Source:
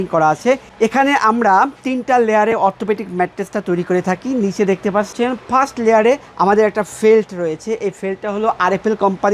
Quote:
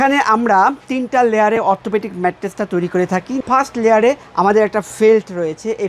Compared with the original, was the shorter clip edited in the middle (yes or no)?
yes